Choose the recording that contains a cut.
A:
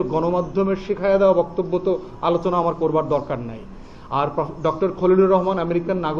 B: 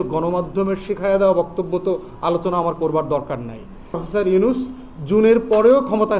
B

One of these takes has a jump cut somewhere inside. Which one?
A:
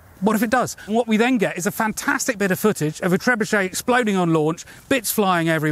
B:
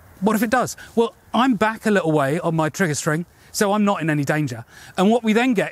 A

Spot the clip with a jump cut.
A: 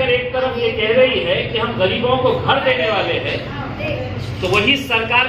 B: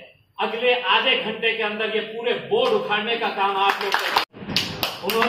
B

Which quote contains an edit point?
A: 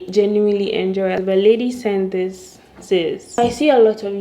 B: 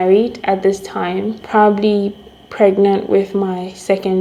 A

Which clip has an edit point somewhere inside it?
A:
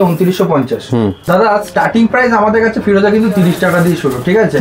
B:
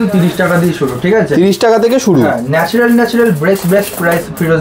A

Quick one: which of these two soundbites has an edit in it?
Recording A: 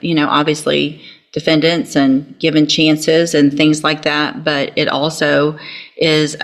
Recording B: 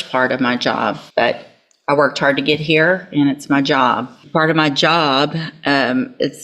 B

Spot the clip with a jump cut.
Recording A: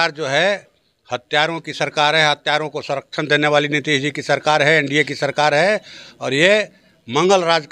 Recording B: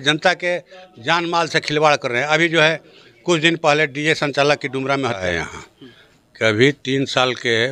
B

